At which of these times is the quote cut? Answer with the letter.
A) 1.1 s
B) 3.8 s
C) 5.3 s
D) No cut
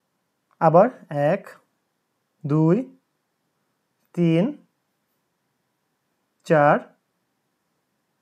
D